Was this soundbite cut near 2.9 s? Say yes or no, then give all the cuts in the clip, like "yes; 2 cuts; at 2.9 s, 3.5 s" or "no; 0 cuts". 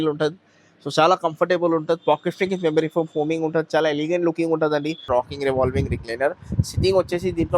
no; 1 cut; at 5.1 s